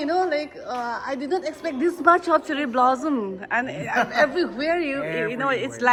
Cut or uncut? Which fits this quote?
uncut